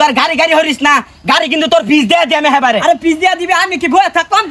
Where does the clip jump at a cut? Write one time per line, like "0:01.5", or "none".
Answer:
none